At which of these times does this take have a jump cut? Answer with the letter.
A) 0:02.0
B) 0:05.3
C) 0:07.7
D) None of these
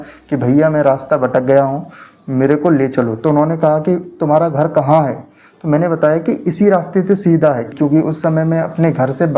C